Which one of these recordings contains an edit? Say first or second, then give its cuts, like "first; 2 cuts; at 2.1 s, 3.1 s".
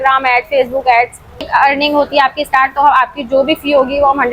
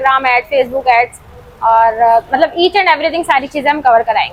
first; 1 cut; at 1.4 s